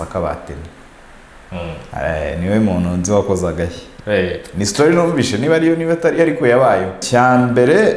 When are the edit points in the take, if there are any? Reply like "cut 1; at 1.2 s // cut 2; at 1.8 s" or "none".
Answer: cut 1; at 7.0 s